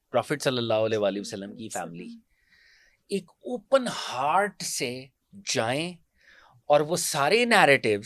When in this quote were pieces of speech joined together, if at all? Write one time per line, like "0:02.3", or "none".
none